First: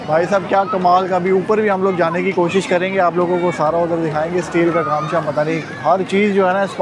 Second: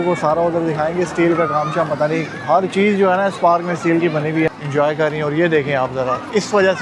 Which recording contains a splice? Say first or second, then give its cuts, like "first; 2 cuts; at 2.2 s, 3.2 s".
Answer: second; 1 cut; at 4.6 s